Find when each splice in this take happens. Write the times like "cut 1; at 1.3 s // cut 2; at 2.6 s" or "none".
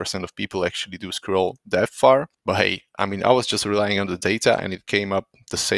cut 1; at 2.3 s

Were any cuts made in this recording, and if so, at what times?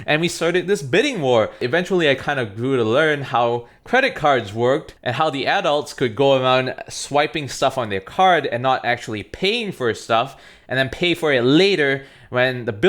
cut 1; at 1.6 s

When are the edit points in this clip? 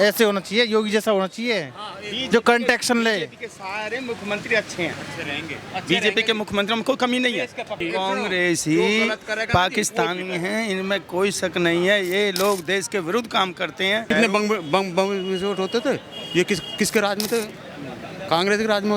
cut 1; at 7.7 s // cut 2; at 14.0 s

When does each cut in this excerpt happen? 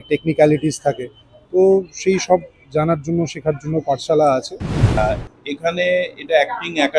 cut 1; at 5.0 s

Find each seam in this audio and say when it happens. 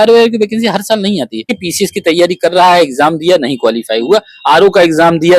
cut 1; at 1.5 s

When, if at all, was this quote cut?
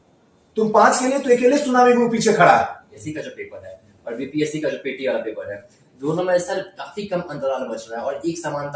cut 1; at 3.0 s

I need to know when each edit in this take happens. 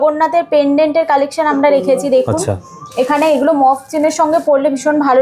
none

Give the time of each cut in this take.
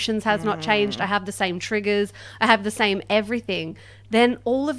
none

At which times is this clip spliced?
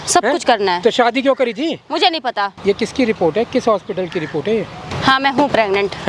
cut 1; at 2.5 s // cut 2; at 4.9 s

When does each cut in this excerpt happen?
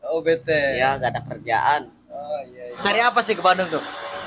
cut 1; at 2.6 s

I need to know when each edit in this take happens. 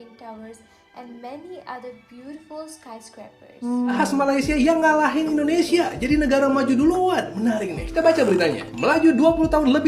cut 1; at 4.0 s

